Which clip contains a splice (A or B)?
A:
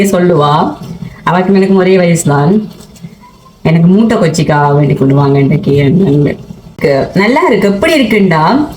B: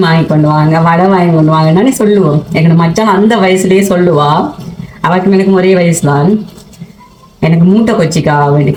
A